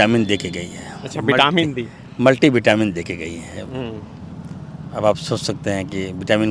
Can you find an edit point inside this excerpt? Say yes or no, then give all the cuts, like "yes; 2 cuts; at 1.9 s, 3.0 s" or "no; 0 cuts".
no; 0 cuts